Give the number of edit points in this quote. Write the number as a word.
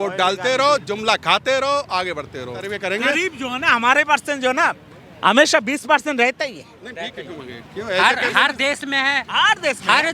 one